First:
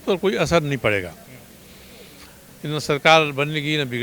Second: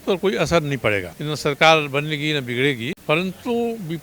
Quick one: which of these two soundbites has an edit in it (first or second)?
second